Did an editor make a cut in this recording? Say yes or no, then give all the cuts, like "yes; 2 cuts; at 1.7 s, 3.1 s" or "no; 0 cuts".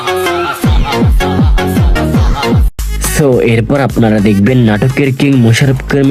no; 0 cuts